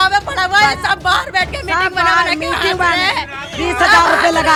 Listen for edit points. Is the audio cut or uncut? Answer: uncut